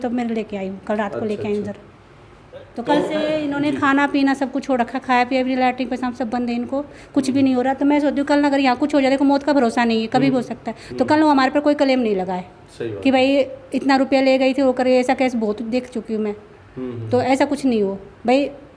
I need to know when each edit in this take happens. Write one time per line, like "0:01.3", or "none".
none